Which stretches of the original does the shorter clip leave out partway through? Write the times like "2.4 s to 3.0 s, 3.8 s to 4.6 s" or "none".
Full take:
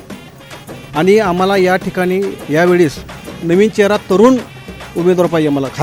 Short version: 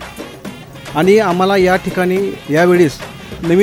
none